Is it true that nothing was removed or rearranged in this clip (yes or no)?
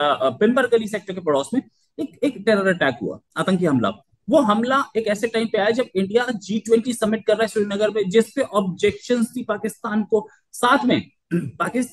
yes